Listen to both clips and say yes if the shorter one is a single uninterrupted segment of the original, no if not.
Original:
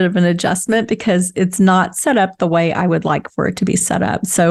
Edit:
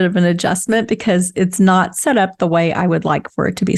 yes